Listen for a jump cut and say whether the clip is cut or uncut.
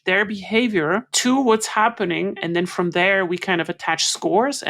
cut